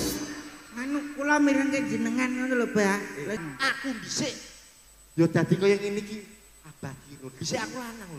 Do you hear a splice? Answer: yes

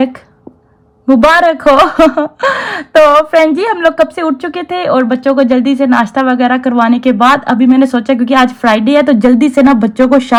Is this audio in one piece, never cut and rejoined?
yes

